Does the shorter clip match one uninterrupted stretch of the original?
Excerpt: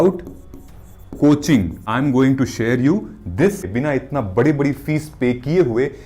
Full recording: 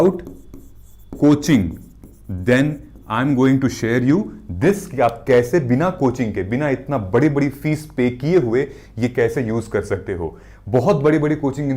no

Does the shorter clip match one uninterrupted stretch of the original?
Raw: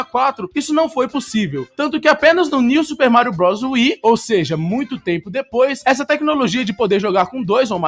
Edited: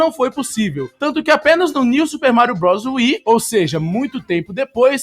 yes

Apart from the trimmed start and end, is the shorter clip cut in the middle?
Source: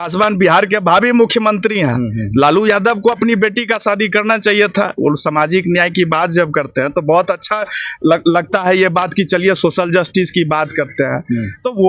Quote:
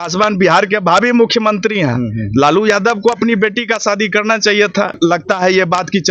yes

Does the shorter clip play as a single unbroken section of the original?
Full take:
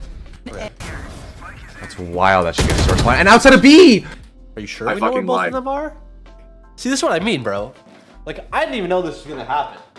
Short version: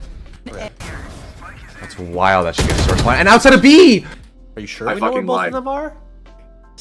yes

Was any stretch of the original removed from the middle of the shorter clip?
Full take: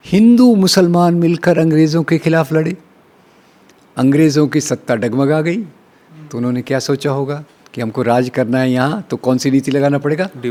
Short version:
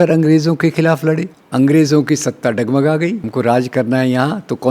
yes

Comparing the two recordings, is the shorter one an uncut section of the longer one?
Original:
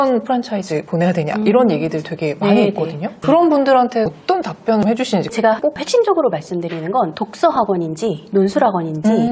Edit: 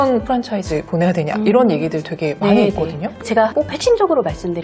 no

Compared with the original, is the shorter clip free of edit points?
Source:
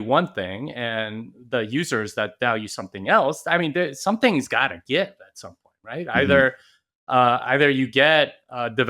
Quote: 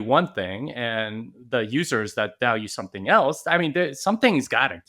yes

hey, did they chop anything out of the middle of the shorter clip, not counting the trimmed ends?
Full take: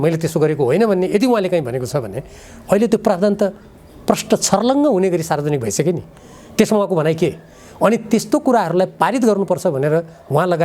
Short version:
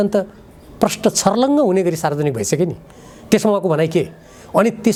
no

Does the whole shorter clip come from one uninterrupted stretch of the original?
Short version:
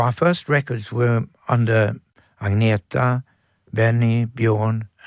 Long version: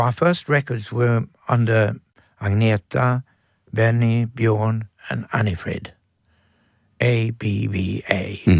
yes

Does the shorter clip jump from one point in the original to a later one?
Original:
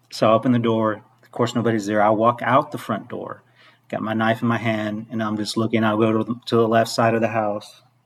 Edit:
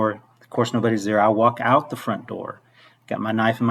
no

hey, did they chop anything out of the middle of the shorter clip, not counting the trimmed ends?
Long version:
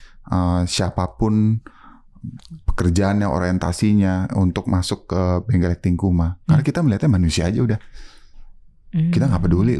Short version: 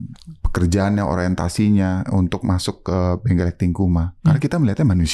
no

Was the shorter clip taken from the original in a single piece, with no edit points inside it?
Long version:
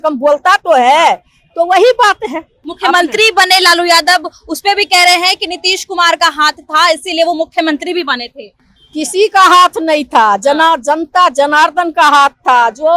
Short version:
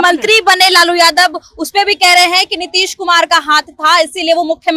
yes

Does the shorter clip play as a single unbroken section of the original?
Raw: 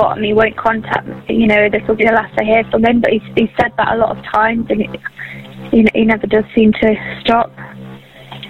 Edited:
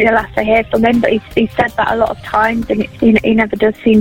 no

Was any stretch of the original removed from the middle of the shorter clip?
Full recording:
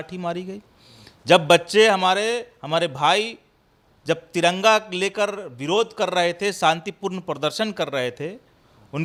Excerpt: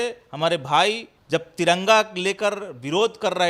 yes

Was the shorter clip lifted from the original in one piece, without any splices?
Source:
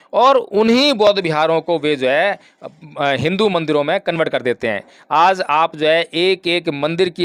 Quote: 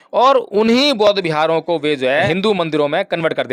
no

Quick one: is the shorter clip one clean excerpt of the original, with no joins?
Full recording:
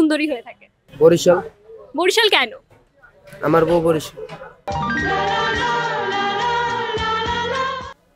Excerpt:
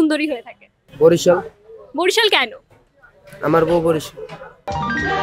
yes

